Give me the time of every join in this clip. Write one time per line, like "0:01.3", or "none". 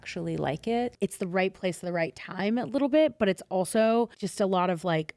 0:00.9
0:04.2